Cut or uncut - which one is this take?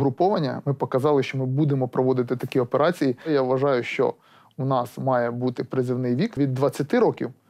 cut